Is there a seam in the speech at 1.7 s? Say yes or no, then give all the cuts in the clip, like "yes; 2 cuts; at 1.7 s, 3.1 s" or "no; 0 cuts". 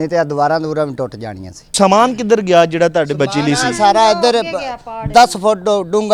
yes; 1 cut; at 1.7 s